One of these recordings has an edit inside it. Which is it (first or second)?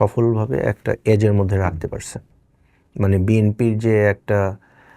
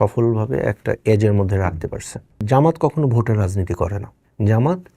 second